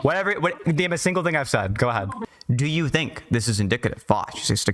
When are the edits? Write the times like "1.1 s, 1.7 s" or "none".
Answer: 2.2 s

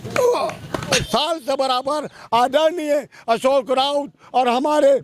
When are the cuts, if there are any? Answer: 1.0 s

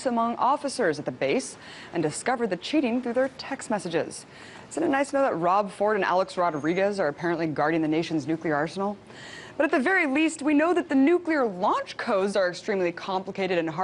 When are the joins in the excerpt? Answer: none

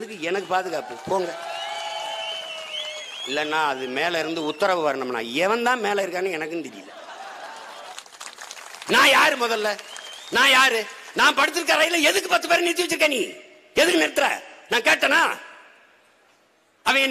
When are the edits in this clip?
7.9 s

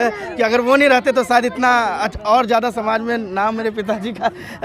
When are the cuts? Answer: none

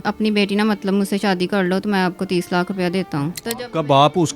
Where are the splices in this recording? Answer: none

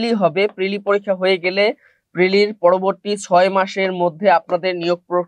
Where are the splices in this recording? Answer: none

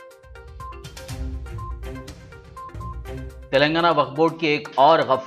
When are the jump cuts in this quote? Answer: 3.2 s

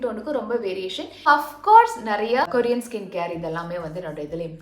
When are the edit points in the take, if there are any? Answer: 1.2 s, 2.5 s

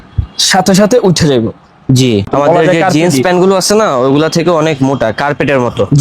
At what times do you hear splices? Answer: 2.3 s

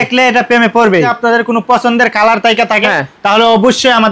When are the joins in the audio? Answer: 1.1 s

